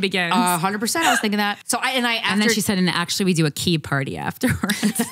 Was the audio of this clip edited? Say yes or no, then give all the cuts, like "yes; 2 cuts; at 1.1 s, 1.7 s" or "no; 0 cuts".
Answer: yes; 1 cut; at 1.6 s